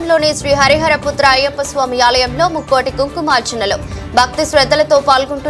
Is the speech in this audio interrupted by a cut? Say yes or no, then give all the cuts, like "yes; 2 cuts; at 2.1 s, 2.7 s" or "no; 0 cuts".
no; 0 cuts